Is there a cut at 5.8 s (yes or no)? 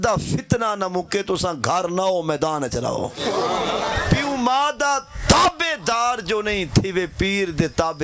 no